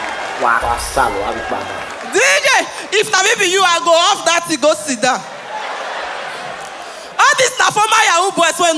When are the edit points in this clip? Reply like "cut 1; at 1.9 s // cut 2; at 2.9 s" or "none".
none